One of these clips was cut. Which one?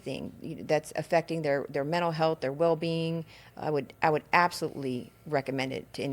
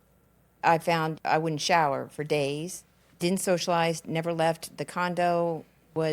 second; 2 cuts; at 1.1 s, 3.1 s

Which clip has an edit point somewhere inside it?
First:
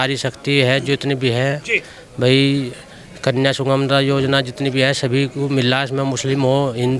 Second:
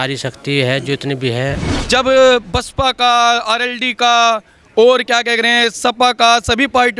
second; 1 cut; at 1.7 s

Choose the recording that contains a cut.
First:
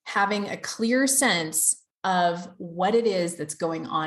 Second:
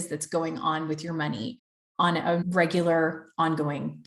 second; 1 cut; at 2.5 s

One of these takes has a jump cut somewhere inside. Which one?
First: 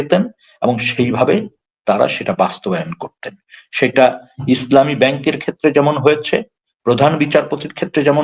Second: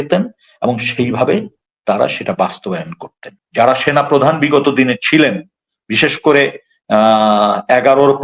second; 1 cut; at 3.4 s

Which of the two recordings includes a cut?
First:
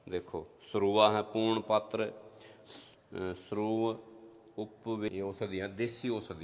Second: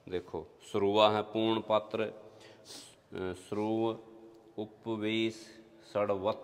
first; 1 cut; at 5.1 s

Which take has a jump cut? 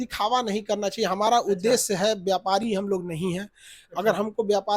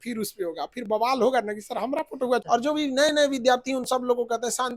second; 1 cut; at 2.4 s

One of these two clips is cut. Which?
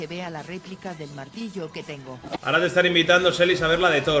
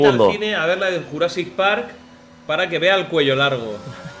first; 1 cut; at 2.4 s

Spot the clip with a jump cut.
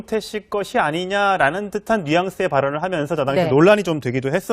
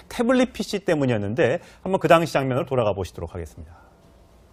first; 1 cut; at 2.7 s

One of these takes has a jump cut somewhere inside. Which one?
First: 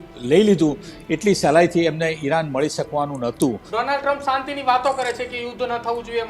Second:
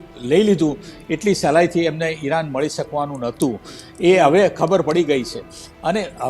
first; 1 cut; at 3.6 s

